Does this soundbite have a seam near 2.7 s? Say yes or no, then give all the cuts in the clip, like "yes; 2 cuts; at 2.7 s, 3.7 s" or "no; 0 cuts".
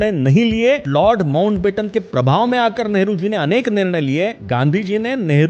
no; 2 cuts; at 0.8 s, 4.4 s